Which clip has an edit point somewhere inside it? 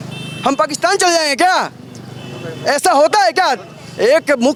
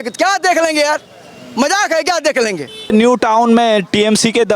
second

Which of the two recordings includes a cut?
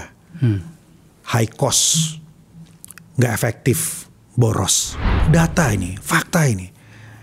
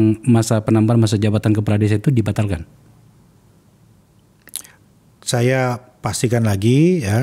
first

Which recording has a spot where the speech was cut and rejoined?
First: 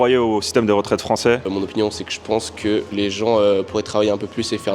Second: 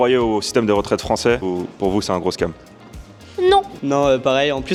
first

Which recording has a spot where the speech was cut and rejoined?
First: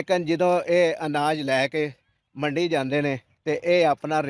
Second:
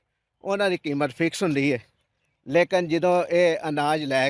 first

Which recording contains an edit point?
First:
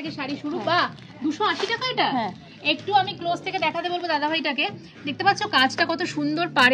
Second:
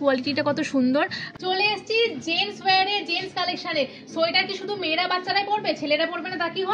second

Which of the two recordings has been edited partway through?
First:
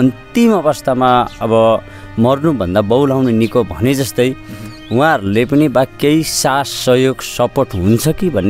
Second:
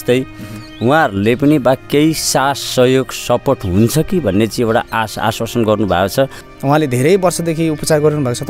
second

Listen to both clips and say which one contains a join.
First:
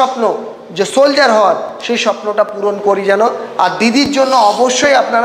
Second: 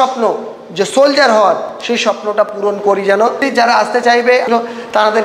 second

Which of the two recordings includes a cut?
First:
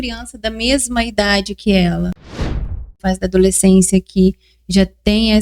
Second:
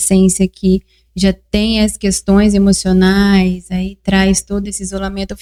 first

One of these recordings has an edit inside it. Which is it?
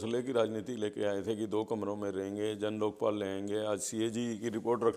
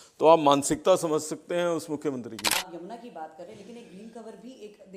second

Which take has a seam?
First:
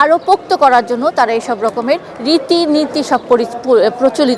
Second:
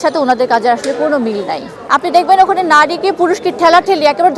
second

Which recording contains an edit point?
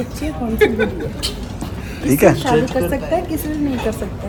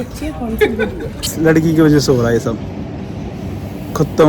second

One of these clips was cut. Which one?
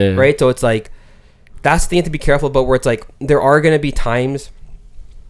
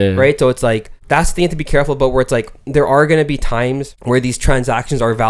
second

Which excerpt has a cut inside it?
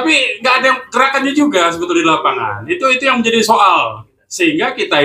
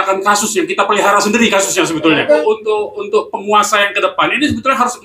second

